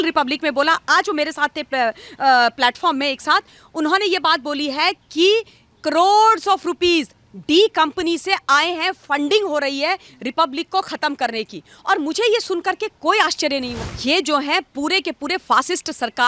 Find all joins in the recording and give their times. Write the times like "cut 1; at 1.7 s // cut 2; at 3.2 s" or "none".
cut 1; at 13.7 s